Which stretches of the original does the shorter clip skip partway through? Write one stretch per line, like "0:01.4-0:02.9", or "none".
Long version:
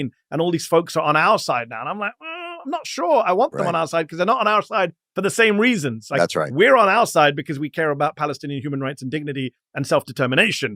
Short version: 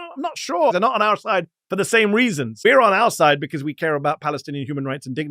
0:03.2-0:04.2
0:06.0-0:06.5